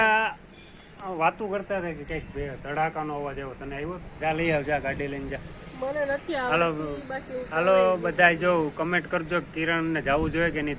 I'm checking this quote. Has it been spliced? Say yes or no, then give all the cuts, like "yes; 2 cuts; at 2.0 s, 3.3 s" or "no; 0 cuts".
yes; 1 cut; at 4.1 s